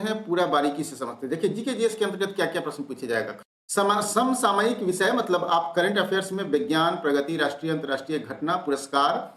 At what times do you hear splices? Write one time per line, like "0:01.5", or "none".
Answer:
0:03.3